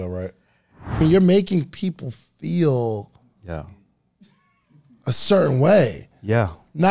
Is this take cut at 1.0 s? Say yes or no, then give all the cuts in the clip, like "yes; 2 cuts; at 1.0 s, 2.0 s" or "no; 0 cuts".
yes; 1 cut; at 1.0 s